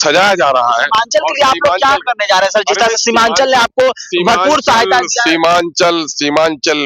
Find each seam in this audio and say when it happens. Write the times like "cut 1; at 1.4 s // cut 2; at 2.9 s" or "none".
none